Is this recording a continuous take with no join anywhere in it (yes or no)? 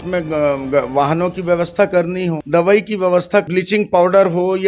no